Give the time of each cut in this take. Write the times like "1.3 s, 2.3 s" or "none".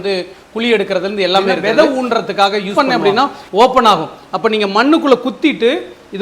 1.5 s, 2.7 s